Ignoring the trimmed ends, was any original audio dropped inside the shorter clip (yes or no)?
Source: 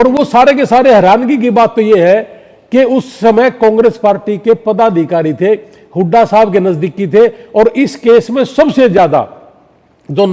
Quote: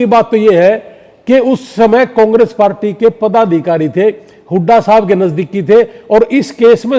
no